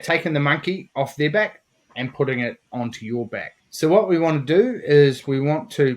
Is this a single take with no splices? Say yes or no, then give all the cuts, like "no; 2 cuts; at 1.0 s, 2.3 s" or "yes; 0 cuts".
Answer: no; 1 cut; at 3.6 s